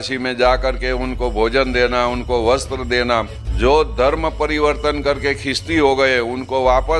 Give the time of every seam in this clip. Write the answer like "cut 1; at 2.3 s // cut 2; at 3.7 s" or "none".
cut 1; at 3.4 s